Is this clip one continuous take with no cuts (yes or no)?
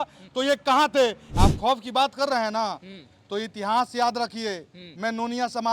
no